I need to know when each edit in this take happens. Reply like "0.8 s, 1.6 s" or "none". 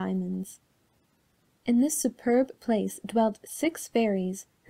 3.5 s